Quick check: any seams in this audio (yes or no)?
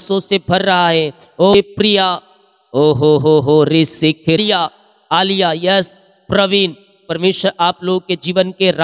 yes